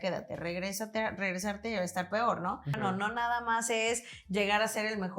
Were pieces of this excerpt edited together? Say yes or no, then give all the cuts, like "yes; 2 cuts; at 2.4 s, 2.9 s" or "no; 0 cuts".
yes; 1 cut; at 2.8 s